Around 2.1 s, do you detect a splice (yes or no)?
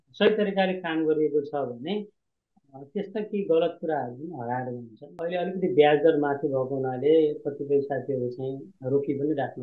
no